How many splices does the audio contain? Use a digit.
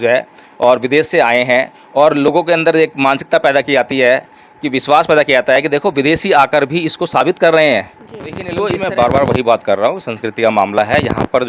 1